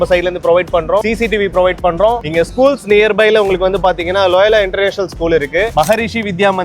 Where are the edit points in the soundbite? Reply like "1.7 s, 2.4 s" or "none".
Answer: 1.0 s, 2.2 s